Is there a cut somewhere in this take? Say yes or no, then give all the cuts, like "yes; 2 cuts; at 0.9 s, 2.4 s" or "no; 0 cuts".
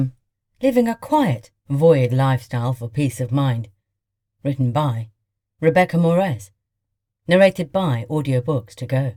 no; 0 cuts